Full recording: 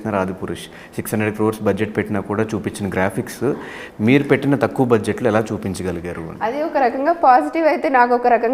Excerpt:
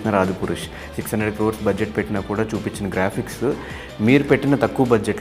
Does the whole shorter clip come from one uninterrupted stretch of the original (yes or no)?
yes